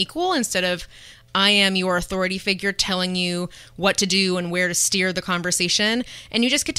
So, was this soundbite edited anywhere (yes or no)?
no